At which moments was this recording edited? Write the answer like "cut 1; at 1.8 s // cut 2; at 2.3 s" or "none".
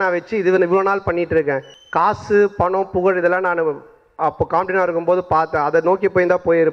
cut 1; at 1.7 s